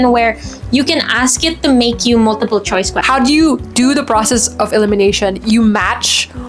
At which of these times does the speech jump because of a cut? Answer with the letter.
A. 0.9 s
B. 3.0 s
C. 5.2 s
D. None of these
B